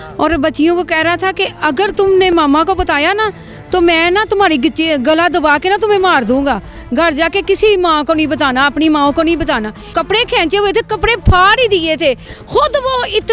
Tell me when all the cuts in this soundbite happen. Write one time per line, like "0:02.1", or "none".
0:09.8